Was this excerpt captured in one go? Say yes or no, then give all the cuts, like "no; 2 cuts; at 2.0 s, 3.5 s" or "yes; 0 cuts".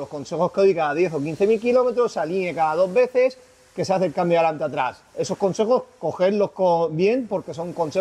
yes; 0 cuts